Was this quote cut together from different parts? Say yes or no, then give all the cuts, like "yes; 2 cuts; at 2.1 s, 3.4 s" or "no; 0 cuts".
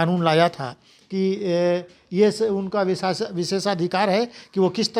no; 0 cuts